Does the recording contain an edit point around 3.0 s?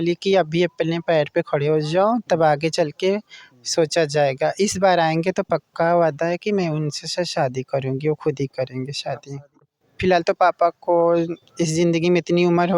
no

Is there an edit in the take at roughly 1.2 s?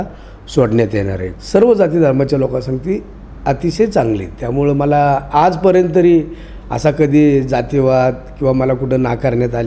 yes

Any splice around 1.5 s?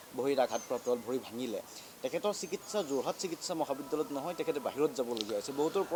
no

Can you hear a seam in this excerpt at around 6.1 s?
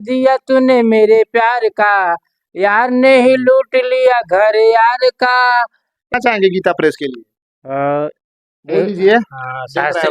yes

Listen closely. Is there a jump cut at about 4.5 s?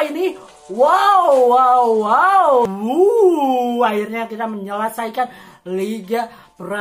no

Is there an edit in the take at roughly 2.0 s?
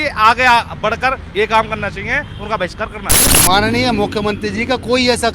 no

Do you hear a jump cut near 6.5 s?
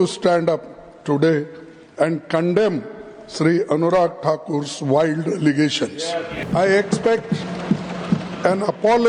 yes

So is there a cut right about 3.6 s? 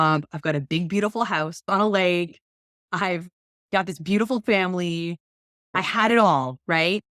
no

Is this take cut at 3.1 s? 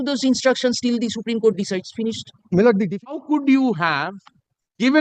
yes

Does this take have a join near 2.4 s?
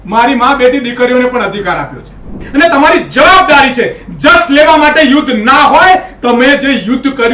yes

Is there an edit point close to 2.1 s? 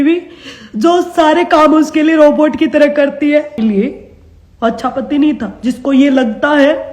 no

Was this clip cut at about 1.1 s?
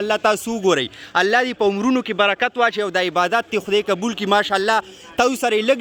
no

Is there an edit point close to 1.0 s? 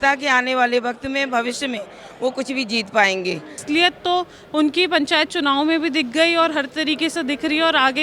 no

